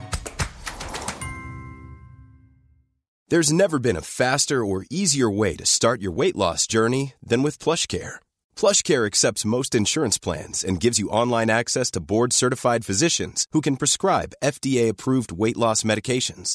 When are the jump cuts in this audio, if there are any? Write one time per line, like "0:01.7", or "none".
none